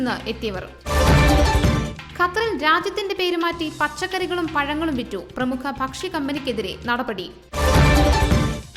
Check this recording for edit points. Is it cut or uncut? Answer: uncut